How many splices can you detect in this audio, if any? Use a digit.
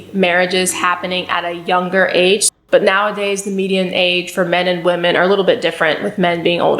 1